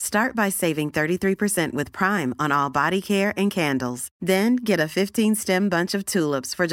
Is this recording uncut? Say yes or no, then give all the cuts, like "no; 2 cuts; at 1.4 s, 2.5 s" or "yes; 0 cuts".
yes; 0 cuts